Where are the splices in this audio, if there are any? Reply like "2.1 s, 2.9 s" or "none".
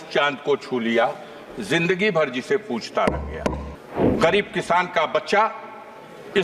3.7 s